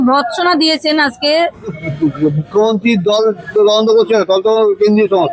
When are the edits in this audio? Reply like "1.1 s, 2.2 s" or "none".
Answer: 1.8 s